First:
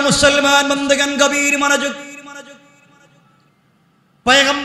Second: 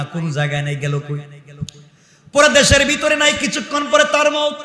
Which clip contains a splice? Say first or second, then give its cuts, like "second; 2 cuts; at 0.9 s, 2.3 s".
first; 1 cut; at 3.5 s